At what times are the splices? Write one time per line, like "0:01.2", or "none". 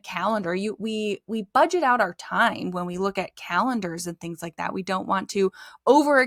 none